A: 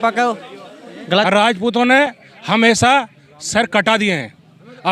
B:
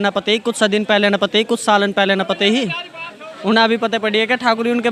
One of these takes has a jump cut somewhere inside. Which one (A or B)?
A